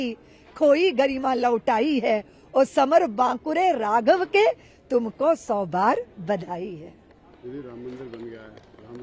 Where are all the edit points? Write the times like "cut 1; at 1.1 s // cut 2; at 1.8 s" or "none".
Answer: none